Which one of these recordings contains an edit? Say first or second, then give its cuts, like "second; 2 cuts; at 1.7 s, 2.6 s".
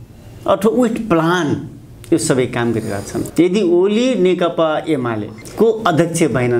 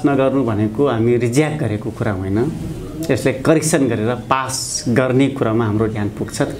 first; 1 cut; at 3.3 s